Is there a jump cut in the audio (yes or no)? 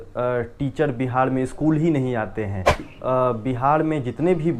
yes